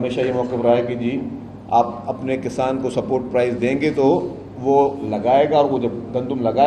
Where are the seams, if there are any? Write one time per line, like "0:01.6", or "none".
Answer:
none